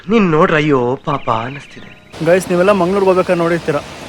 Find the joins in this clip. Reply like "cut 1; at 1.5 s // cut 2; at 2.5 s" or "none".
cut 1; at 2.0 s